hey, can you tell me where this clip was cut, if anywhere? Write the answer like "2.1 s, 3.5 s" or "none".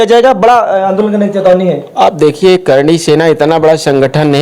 none